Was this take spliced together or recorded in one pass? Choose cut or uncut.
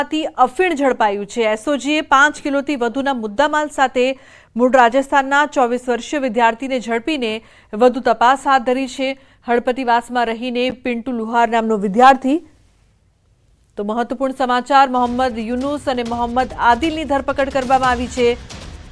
uncut